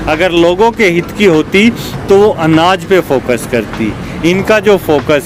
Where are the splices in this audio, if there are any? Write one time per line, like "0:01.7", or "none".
none